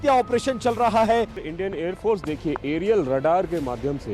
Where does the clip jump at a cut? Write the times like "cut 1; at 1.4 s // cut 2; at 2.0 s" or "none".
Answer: cut 1; at 1.4 s